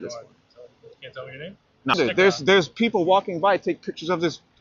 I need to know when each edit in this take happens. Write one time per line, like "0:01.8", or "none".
0:01.9